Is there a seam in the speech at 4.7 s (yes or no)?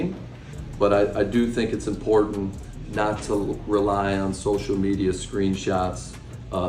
no